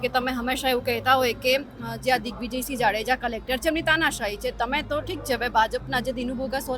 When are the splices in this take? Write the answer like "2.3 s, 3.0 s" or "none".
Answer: none

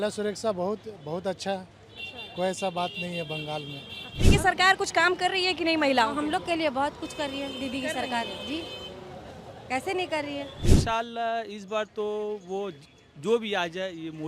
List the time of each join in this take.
4.2 s, 10.6 s

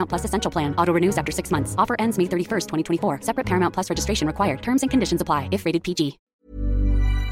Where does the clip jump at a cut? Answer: 6.2 s

